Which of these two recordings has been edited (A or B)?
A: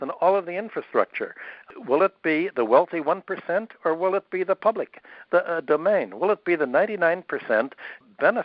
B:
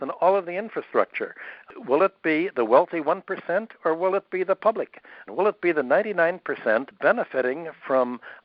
B